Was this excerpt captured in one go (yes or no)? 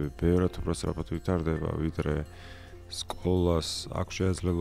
yes